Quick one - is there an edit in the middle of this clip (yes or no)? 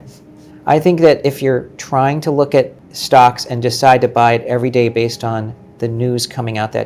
no